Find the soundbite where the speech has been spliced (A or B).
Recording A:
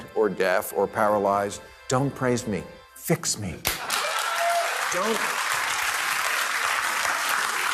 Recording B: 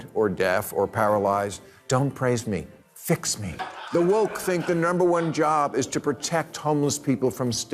B